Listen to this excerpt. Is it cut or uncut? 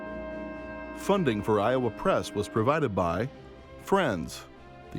cut